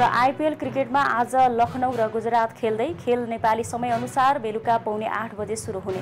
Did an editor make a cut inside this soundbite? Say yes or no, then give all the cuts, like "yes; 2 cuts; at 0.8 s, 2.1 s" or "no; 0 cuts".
no; 0 cuts